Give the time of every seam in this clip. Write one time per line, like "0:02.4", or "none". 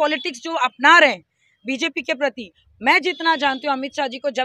none